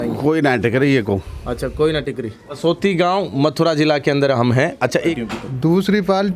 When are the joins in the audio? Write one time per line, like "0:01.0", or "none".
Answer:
0:02.6
0:05.2